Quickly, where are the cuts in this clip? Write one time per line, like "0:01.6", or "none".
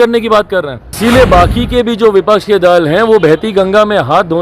0:01.0